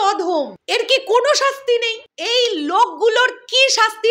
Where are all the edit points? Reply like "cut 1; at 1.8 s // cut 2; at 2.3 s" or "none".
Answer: cut 1; at 2.0 s